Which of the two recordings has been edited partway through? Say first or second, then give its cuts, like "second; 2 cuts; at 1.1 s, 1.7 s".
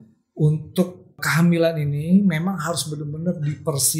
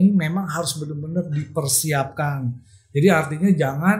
first; 1 cut; at 1.2 s